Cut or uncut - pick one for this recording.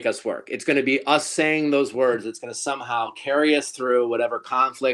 uncut